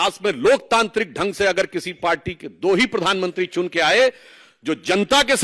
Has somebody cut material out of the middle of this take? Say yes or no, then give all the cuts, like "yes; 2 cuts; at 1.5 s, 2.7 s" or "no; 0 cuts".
no; 0 cuts